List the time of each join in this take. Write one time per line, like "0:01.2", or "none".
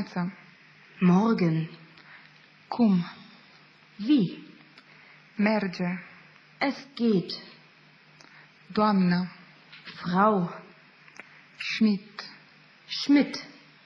none